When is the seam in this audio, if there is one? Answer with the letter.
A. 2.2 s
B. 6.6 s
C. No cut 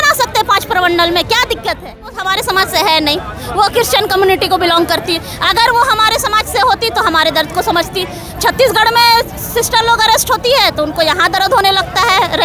A